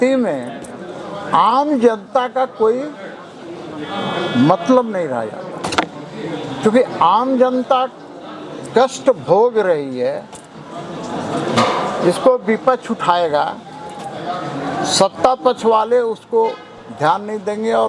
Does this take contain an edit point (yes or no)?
no